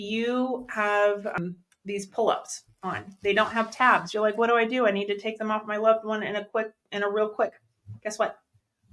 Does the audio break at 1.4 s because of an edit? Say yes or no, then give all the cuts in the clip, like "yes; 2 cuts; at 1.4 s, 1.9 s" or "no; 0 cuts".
yes; 1 cut; at 1.4 s